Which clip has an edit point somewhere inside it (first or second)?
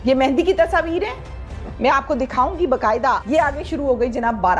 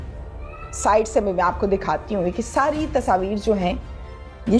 first